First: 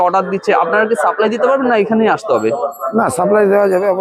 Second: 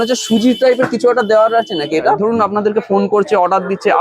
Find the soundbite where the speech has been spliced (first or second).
second